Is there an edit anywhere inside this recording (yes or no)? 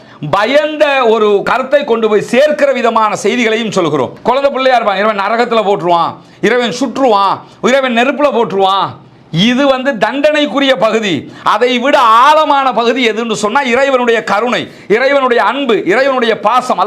yes